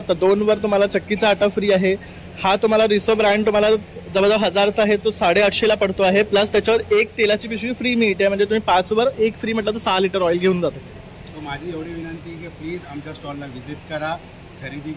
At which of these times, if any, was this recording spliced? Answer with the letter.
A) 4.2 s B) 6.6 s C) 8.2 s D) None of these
D